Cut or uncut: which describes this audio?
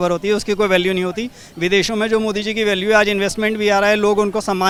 uncut